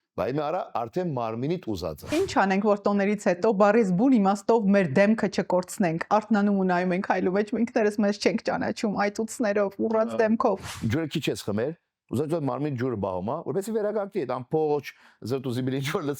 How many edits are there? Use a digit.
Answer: 2